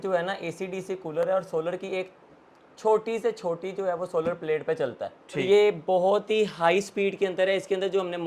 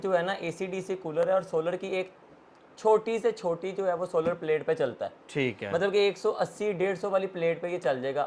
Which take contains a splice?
first; 1 cut; at 5.4 s

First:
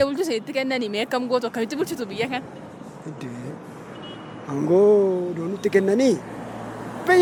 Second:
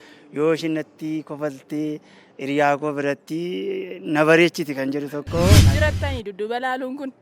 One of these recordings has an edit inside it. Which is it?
second; 1 cut; at 5.7 s

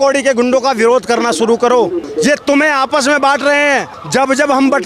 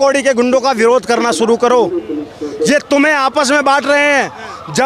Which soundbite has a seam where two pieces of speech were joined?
first; 2 cuts; at 2.0 s, 4.0 s

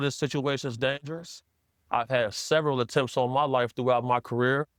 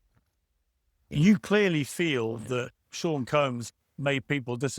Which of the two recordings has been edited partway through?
second; 2 cuts; at 2.8 s, 3.6 s

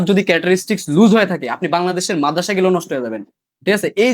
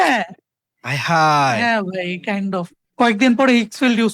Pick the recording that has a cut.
second; 1 cut; at 2.8 s

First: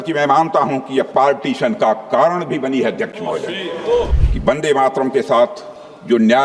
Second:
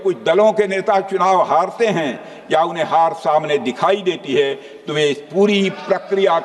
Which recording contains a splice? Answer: first; 1 cut; at 4.2 s

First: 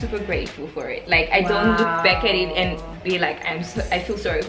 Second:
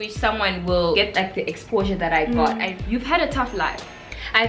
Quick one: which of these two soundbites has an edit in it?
second; 2 cuts; at 1.0 s, 2.7 s

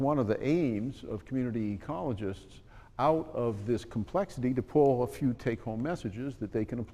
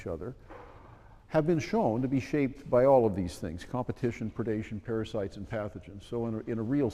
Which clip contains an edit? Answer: second; 1 cut; at 2.5 s

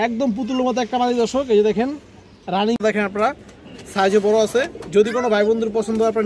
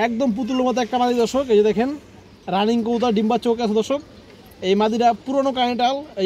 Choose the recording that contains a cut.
first; 1 cut; at 2.8 s

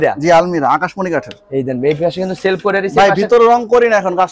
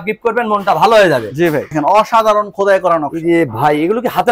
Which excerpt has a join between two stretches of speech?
second; 1 cut; at 1.7 s

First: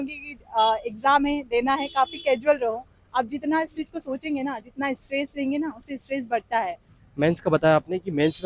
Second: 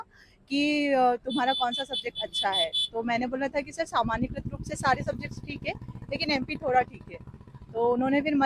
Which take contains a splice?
first; 1 cut; at 6.9 s

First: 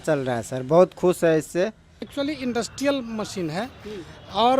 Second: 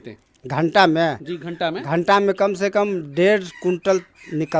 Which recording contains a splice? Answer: first; 1 cut; at 2.0 s

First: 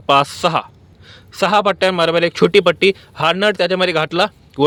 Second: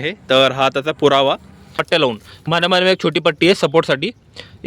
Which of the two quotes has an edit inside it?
second; 1 cut; at 1.7 s

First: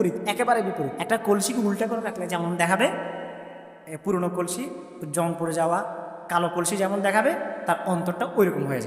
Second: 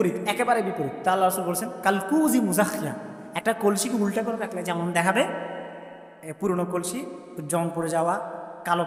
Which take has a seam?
first; 1 cut; at 0.9 s

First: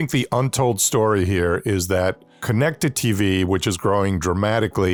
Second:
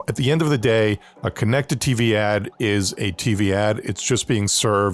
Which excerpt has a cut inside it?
second; 1 cut; at 1.1 s

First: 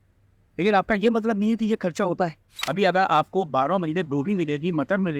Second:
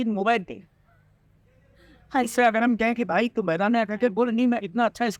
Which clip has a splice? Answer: first; 1 cut; at 2.4 s

